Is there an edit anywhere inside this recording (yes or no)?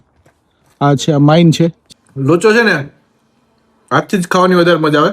yes